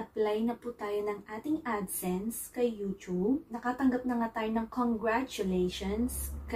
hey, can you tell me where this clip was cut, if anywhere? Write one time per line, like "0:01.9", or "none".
0:03.5